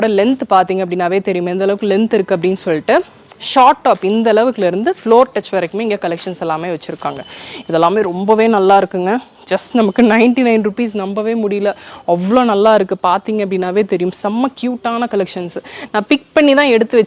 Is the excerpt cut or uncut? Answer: uncut